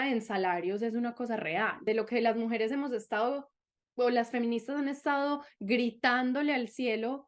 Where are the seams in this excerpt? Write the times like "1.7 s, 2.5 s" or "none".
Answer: 1.8 s